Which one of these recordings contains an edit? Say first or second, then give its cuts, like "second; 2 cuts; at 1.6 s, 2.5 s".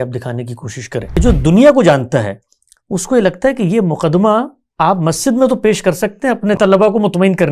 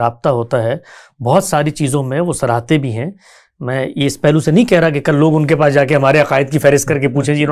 first; 2 cuts; at 1.2 s, 6.6 s